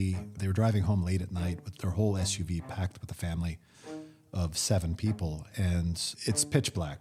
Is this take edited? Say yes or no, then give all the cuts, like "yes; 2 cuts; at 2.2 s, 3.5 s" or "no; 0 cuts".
no; 0 cuts